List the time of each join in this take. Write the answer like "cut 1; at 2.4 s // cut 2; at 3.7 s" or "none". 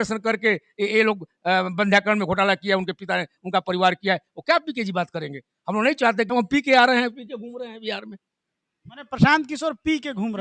cut 1; at 6.3 s